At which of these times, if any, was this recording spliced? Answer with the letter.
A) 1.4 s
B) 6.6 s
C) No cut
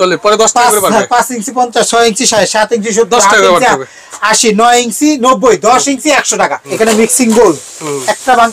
B